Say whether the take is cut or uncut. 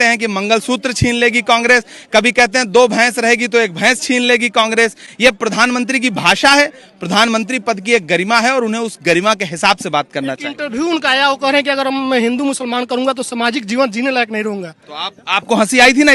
uncut